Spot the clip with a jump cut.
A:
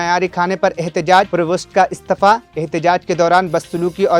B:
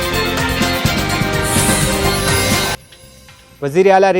B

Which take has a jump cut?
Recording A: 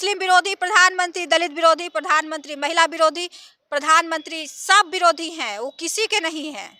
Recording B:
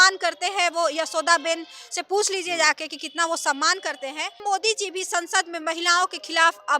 B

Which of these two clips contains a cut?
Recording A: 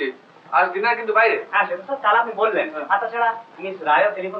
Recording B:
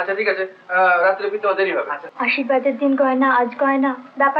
B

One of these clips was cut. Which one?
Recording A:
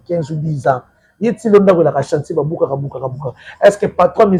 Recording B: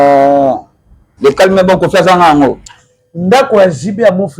B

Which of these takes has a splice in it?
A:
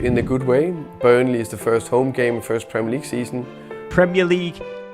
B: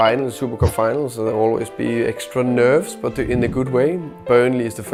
A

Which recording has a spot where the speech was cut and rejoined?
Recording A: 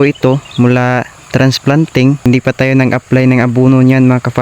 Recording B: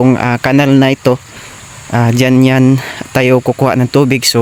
A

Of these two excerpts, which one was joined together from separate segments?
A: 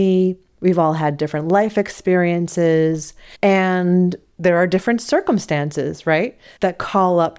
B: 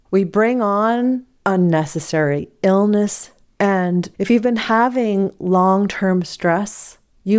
B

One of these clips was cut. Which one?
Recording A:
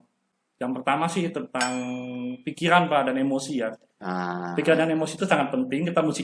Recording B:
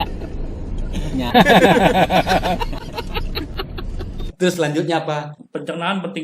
B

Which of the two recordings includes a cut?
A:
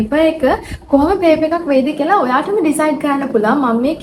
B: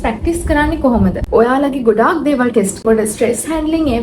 B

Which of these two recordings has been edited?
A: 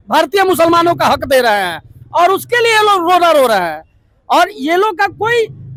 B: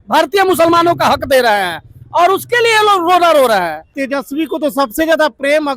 B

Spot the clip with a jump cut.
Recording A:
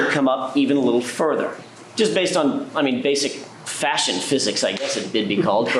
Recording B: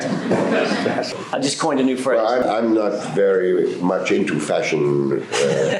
B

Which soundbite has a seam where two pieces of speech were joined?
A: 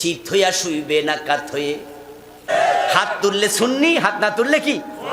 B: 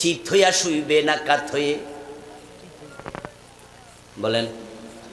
A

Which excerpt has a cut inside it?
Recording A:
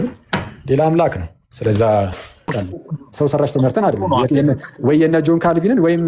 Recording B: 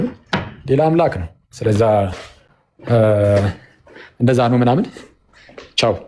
A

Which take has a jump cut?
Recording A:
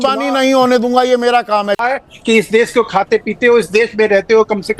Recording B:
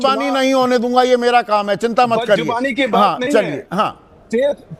A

